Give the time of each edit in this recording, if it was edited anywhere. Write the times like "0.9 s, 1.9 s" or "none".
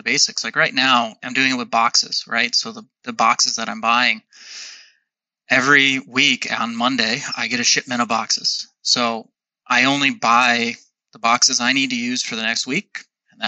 1.2 s